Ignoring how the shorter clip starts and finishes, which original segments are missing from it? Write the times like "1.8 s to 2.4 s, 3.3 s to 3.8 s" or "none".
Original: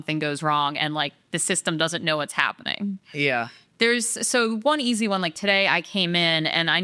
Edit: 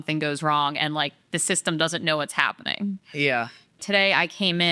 3.7 s to 5.3 s

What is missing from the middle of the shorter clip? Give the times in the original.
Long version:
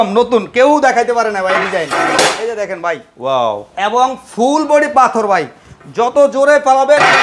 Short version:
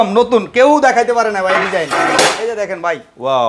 none

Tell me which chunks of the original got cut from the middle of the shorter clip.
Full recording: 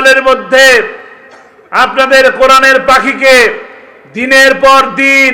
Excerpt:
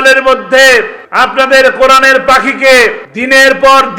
1.0 s to 1.6 s, 3.7 s to 4.1 s

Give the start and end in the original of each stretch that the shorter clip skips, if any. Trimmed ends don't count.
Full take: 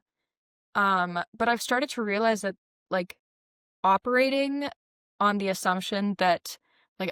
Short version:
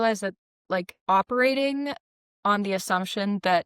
3.1 s to 3.7 s

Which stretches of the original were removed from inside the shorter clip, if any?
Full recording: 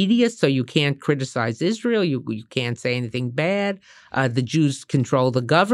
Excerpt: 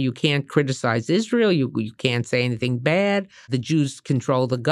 4.0 s to 4.3 s

